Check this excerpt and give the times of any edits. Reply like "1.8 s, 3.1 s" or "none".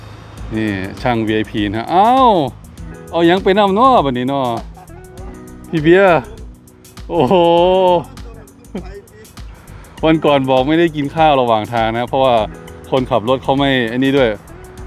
none